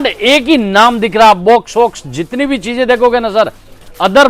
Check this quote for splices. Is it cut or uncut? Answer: uncut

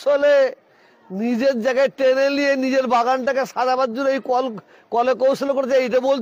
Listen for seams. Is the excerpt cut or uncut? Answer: uncut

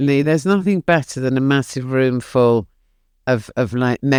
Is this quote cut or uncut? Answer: uncut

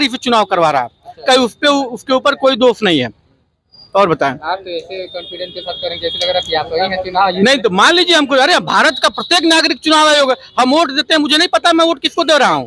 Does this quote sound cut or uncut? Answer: uncut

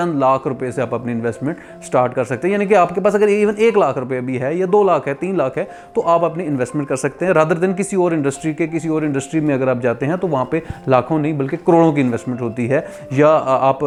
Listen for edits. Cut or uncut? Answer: uncut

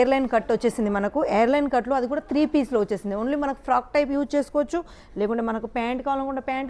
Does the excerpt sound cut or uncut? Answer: uncut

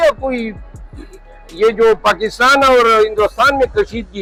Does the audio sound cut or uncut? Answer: uncut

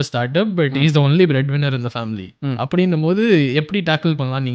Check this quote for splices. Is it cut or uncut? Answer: uncut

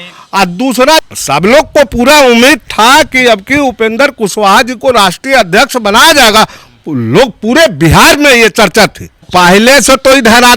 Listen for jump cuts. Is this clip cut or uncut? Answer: cut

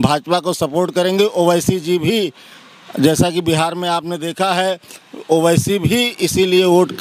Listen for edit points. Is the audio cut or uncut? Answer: uncut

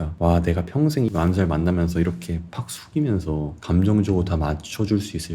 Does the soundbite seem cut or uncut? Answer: uncut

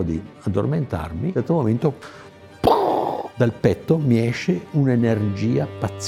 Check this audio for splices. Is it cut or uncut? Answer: uncut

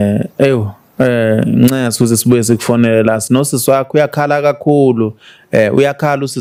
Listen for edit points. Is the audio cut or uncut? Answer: uncut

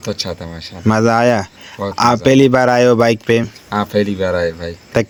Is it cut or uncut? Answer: uncut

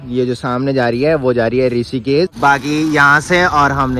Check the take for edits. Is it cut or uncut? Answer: cut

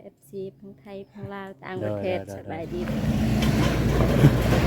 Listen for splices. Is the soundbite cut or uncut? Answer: cut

